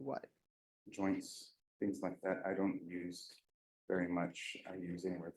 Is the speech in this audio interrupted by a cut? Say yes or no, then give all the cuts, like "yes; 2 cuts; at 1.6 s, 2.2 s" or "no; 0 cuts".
no; 0 cuts